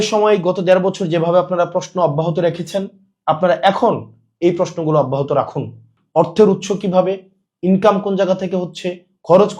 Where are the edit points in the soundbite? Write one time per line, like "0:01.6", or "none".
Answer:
none